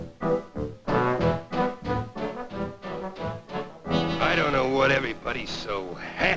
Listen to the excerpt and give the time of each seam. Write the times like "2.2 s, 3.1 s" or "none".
none